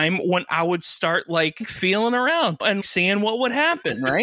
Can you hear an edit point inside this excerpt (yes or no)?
yes